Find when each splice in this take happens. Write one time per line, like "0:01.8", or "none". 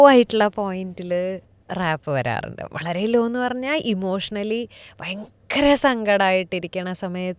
0:01.5